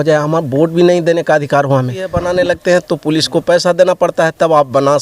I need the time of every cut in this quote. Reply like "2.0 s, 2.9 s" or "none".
2.3 s